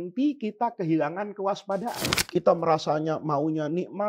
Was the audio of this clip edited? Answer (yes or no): yes